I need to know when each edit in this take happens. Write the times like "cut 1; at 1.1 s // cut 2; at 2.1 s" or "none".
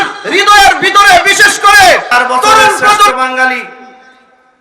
cut 1; at 3.1 s

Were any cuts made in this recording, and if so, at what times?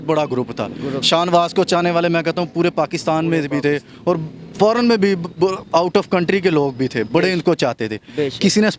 none

